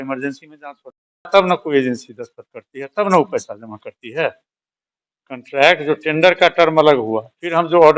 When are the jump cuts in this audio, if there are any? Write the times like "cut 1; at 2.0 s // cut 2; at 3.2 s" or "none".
cut 1; at 1.3 s